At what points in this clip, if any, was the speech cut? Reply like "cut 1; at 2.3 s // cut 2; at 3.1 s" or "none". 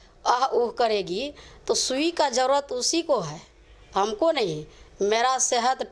none